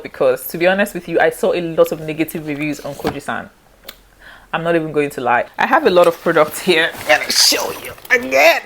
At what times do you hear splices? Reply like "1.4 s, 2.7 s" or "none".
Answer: 5.5 s